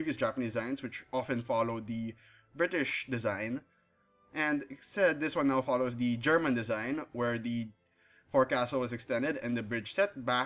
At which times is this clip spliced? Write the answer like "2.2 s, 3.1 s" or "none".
8.7 s